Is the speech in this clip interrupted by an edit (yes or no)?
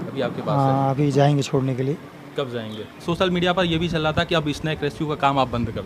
yes